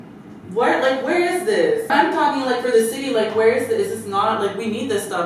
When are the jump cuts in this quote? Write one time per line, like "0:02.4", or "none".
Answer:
0:01.9